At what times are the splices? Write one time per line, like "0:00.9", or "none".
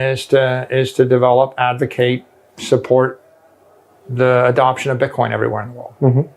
none